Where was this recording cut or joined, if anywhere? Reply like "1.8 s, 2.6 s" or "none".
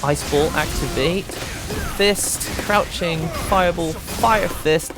none